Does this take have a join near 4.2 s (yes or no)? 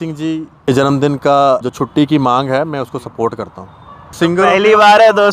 yes